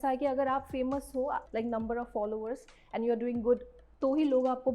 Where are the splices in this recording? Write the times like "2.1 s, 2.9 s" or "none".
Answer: 1.4 s, 3.8 s